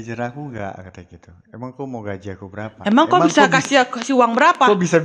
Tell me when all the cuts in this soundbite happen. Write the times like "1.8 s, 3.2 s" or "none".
none